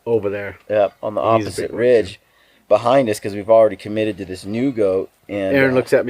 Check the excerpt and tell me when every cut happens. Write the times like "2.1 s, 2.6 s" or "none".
none